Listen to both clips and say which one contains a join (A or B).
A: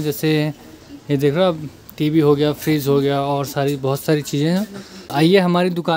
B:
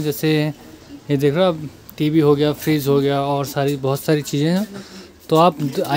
A